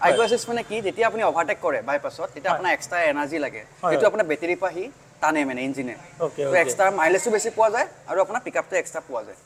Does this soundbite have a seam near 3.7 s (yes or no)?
no